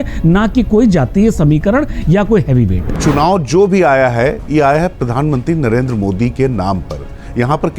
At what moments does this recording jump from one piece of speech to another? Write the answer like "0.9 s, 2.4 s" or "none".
3.0 s

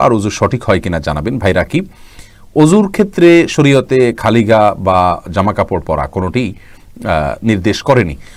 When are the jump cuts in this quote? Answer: none

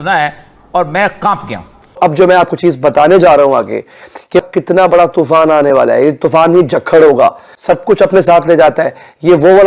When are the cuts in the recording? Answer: 2.0 s, 4.4 s

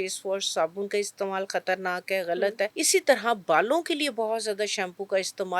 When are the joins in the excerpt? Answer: 2.8 s

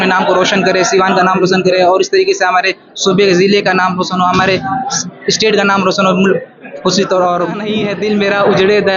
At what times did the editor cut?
7.8 s

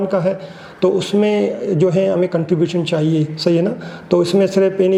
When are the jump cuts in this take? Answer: none

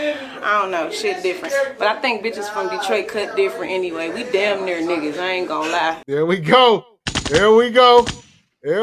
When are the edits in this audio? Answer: 6.0 s

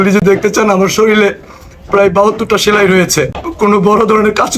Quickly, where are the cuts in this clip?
3.4 s

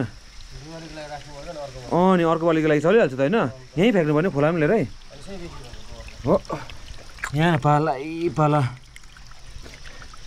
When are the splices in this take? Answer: none

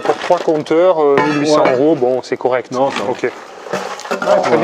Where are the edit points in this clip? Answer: none

